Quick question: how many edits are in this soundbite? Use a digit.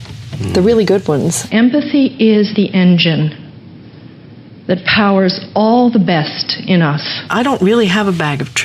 2